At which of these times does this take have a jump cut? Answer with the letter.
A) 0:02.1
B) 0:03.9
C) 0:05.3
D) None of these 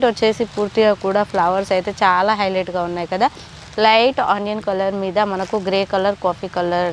D